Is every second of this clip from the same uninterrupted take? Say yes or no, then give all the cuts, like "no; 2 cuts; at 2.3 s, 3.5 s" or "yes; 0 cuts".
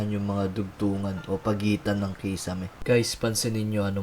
no; 1 cut; at 2.8 s